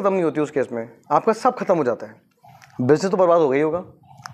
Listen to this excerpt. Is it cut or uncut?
uncut